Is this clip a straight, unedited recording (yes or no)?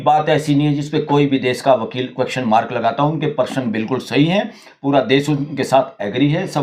yes